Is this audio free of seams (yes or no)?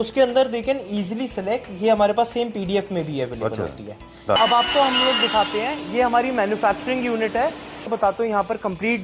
no